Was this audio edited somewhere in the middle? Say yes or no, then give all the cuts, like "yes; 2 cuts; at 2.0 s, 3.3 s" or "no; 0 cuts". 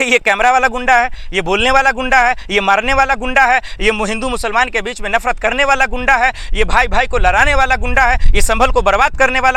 no; 0 cuts